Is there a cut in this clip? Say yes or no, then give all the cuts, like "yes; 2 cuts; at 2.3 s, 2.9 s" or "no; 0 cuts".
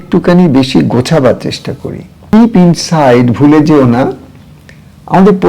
yes; 1 cut; at 2.3 s